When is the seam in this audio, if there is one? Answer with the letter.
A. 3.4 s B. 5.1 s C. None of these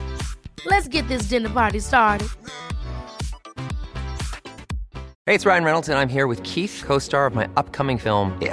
B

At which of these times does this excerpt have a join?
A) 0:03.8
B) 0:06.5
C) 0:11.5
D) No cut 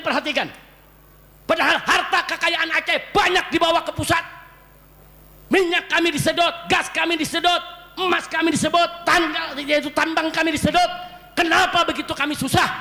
D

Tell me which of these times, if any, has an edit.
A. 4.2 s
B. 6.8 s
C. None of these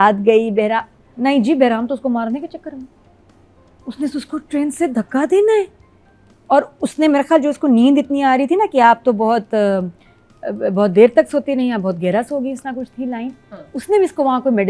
C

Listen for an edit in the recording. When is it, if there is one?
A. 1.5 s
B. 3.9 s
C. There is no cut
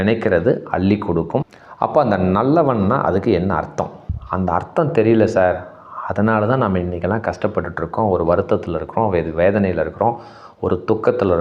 A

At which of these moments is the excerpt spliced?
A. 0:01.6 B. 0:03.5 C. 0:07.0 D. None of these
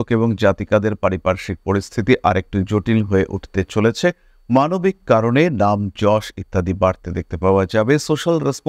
D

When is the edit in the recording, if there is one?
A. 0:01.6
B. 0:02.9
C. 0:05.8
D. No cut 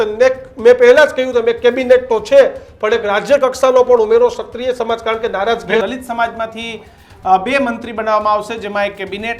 C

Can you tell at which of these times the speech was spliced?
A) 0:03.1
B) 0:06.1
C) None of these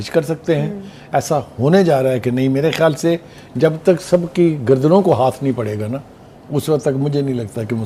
C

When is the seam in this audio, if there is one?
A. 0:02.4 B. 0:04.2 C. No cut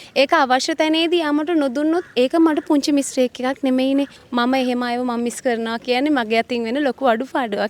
B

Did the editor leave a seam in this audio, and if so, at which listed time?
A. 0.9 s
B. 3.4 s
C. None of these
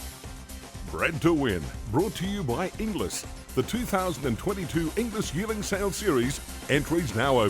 A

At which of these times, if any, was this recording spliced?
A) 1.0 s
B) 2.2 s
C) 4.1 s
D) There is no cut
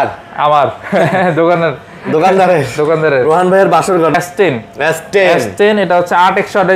C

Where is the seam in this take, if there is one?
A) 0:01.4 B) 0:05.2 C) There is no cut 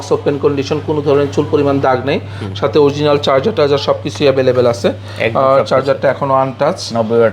C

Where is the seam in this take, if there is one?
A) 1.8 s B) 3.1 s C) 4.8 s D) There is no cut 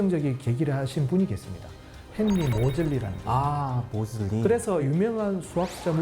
C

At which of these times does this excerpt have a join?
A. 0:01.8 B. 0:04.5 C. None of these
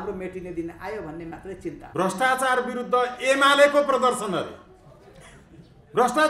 A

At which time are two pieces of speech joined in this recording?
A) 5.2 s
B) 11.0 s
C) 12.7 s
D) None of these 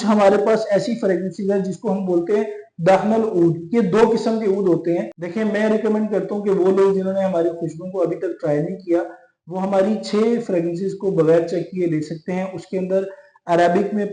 A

